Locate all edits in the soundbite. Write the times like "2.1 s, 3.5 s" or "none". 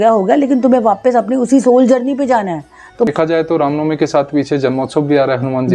3.1 s